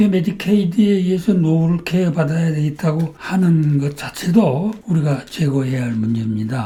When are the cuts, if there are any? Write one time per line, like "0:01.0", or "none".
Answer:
none